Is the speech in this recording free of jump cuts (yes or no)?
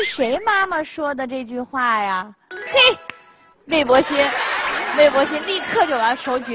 yes